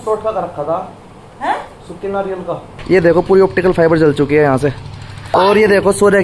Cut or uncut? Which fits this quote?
cut